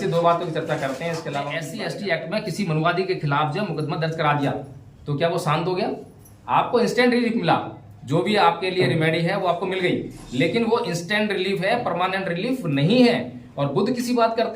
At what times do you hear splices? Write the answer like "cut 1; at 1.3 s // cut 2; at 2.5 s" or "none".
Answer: cut 1; at 1.7 s